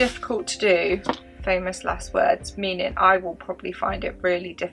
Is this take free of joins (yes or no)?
yes